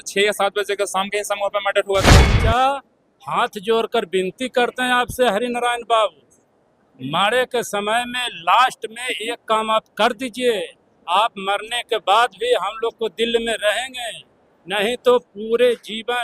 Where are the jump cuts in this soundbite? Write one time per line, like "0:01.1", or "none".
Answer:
0:02.3